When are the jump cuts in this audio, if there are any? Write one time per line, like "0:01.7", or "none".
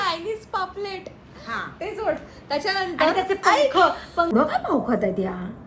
0:04.3